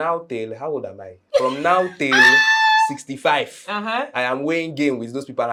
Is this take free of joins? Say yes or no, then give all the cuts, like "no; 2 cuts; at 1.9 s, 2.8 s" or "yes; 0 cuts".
yes; 0 cuts